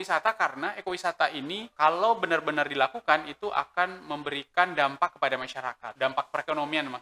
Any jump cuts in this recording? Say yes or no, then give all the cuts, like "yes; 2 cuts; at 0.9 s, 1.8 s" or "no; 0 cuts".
yes; 2 cuts; at 1.7 s, 5.9 s